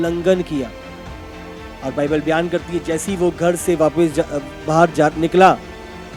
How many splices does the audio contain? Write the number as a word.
zero